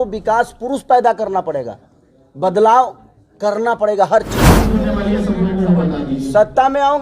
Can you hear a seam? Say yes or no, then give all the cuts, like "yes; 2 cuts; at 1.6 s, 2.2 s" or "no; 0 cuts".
yes; 1 cut; at 4.7 s